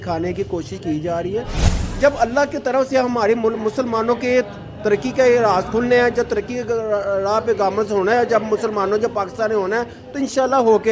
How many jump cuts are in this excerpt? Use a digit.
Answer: 1